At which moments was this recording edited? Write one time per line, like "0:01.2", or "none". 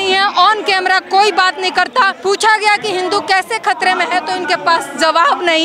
0:02.2